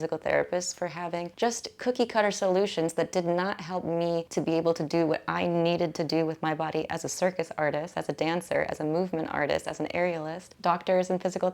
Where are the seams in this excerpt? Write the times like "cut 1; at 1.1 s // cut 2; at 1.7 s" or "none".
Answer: cut 1; at 1.3 s // cut 2; at 4.3 s // cut 3; at 10.4 s